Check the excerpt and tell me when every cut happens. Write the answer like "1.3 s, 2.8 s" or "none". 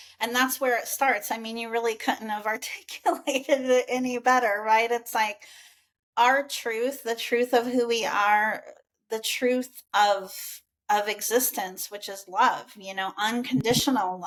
none